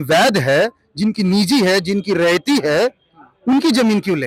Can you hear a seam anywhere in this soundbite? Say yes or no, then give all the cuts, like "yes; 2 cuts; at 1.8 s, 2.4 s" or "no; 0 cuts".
no; 0 cuts